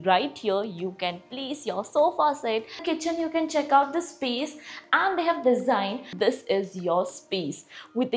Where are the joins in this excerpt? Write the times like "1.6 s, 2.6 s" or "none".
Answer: 2.8 s, 6.1 s